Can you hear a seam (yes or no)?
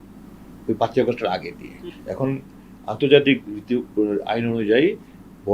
yes